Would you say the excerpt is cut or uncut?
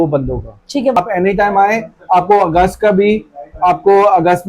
cut